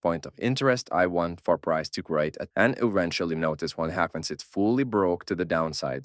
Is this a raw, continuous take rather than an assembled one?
no; 1 cut; at 2.4 s

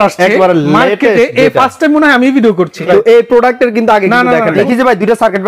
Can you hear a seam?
yes; 2 cuts; at 2.8 s, 4.6 s

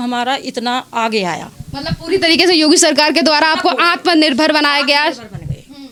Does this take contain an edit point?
no; 0 cuts

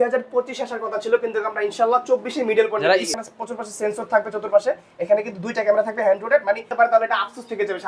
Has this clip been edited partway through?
yes; 2 cuts; at 3.1 s, 6.7 s

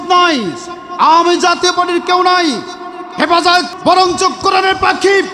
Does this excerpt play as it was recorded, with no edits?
no; 1 cut; at 3.7 s

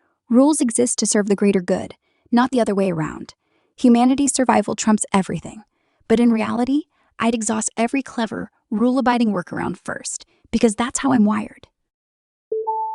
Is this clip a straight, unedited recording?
no; 1 cut; at 11.9 s

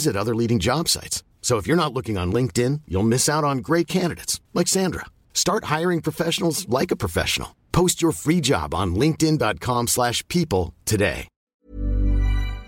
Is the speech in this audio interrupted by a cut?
yes; 1 cut; at 11.3 s

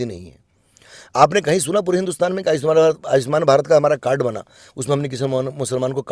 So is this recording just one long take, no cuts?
yes; 0 cuts

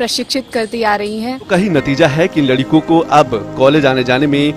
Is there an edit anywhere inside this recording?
yes; 1 cut; at 1.5 s

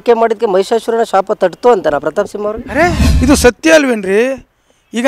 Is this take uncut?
no; 1 cut; at 3.1 s

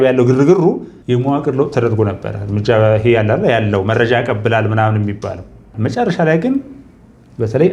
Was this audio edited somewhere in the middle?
yes; 2 cuts; at 0.9 s, 5.7 s

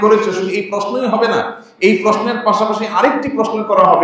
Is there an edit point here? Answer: no; 0 cuts

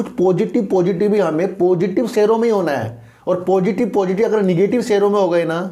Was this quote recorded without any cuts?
yes; 0 cuts

